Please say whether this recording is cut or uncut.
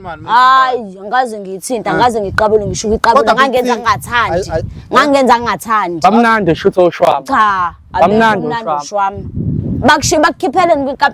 uncut